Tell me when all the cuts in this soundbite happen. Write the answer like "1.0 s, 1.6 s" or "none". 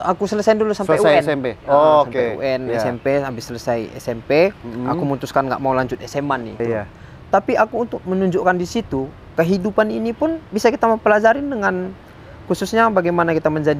6.6 s